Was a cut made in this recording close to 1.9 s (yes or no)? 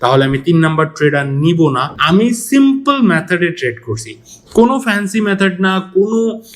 yes